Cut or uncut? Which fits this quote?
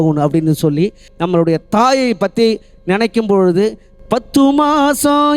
cut